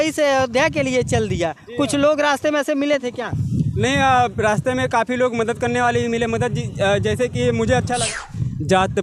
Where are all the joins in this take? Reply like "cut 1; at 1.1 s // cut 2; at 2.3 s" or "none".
cut 1; at 8.0 s